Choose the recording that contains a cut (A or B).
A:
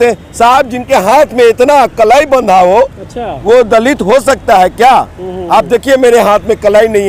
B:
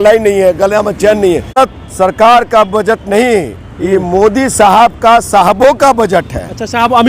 B